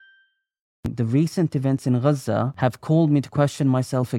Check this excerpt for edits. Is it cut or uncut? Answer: cut